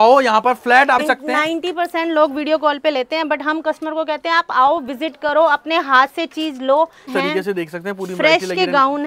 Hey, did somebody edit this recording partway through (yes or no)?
yes